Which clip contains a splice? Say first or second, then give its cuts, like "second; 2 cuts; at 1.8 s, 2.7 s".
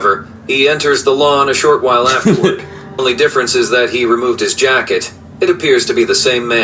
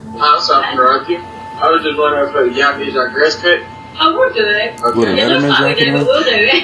first; 1 cut; at 3.0 s